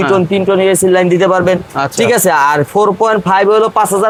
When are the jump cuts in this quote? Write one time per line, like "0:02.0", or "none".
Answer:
none

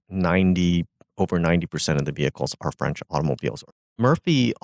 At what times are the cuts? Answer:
0:03.7

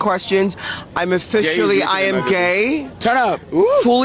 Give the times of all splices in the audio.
none

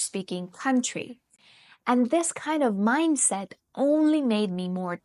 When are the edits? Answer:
none

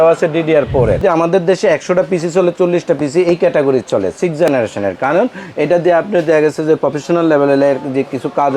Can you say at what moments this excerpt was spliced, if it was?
0:01.0

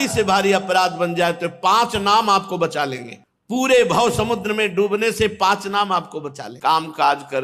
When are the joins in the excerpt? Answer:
0:06.5

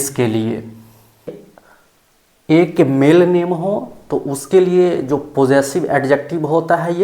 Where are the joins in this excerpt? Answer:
0:01.3

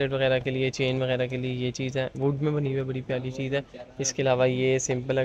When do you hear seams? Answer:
none

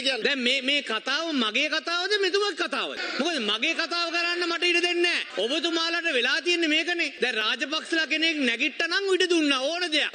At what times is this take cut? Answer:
none

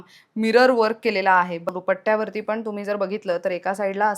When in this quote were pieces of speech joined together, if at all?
0:01.6

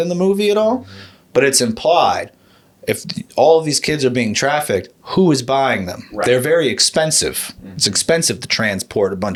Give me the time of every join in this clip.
none

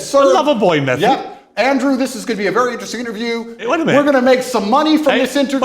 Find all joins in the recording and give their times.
0:03.6

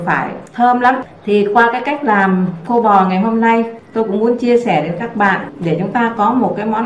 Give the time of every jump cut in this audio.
0:01.1

